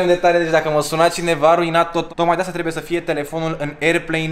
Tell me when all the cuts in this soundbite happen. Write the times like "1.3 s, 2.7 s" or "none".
2.1 s